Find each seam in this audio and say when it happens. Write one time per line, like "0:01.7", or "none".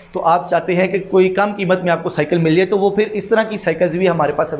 none